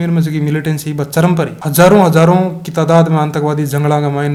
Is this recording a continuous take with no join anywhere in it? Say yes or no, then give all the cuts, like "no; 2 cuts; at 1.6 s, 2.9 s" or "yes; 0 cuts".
yes; 0 cuts